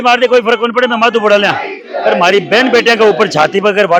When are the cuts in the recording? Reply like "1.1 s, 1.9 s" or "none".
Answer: none